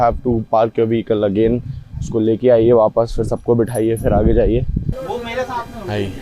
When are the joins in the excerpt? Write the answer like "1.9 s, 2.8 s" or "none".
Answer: 4.8 s